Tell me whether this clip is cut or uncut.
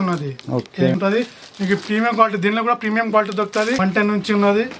cut